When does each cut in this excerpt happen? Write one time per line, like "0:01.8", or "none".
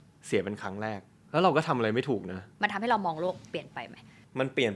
0:01.1
0:02.4